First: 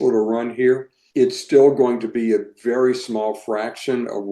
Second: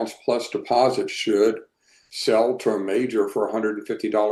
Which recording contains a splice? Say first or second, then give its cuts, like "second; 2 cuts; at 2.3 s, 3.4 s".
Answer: first; 1 cut; at 1.0 s